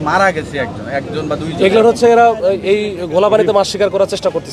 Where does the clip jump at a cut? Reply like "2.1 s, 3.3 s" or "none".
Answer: none

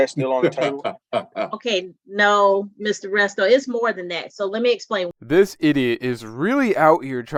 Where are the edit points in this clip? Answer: none

